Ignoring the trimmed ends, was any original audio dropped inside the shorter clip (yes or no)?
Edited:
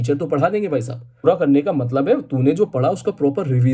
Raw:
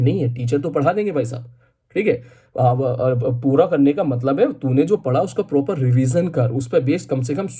yes